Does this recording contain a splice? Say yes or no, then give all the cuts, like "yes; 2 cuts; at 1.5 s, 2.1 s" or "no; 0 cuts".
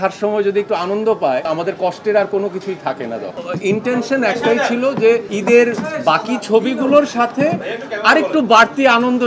yes; 3 cuts; at 1.4 s, 3.3 s, 5.3 s